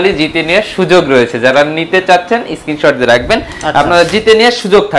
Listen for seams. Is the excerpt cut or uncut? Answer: uncut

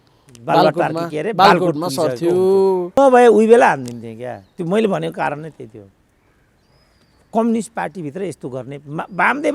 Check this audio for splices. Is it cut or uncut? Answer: cut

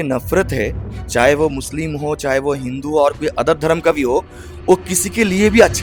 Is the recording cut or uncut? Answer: uncut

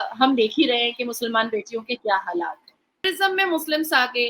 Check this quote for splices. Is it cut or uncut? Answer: cut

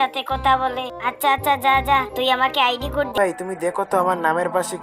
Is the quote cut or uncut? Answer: cut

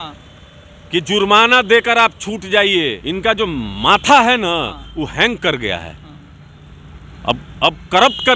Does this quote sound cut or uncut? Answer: cut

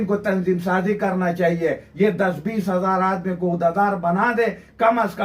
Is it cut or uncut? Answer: uncut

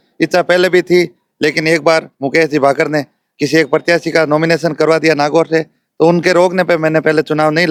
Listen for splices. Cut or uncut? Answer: uncut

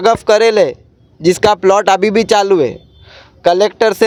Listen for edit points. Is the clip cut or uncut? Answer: uncut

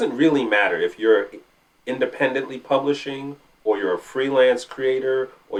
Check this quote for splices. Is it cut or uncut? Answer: uncut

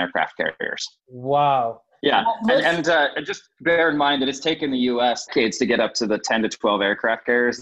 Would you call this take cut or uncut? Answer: uncut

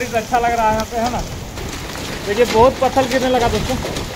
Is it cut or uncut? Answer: cut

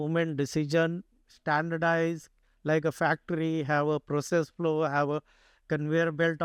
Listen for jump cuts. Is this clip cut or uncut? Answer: uncut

